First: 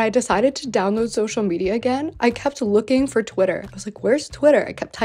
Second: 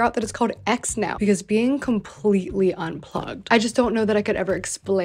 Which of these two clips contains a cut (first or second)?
second